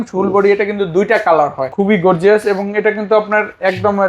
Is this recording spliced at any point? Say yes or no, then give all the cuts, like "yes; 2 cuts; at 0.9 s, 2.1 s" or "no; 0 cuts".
yes; 1 cut; at 1.7 s